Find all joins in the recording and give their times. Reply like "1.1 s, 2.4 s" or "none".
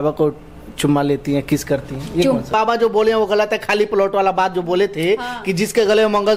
2.5 s